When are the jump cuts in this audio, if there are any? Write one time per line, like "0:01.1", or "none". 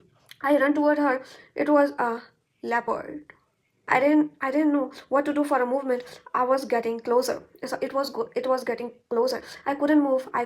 0:03.7